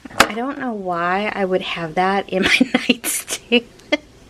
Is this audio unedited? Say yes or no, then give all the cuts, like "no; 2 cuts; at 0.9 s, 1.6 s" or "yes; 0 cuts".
yes; 0 cuts